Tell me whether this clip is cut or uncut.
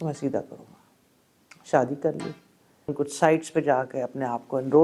cut